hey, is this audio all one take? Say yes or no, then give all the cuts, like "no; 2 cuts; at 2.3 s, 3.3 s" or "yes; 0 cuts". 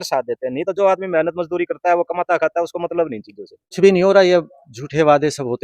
no; 1 cut; at 3.8 s